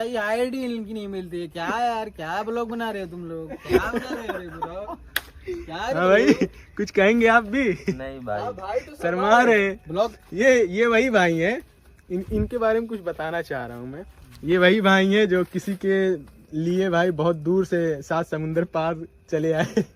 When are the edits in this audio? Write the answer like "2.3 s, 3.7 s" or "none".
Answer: none